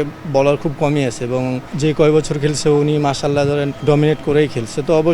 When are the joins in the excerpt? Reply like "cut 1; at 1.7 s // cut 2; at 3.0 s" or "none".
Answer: cut 1; at 1.8 s // cut 2; at 3.7 s